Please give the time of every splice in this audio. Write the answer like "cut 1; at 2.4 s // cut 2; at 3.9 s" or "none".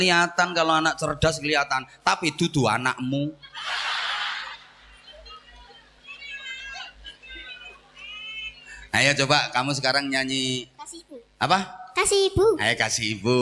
none